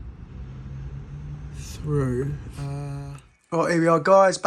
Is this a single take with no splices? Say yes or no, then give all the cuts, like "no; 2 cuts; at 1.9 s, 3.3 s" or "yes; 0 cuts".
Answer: no; 1 cut; at 2.9 s